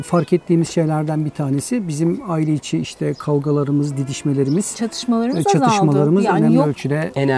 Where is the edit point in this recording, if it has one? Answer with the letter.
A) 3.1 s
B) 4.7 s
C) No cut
C